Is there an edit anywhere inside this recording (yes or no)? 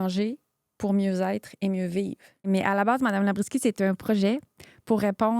yes